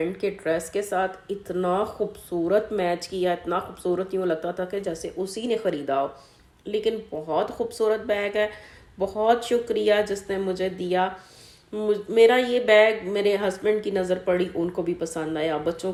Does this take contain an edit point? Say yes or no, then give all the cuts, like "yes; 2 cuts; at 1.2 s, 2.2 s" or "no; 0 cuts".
no; 0 cuts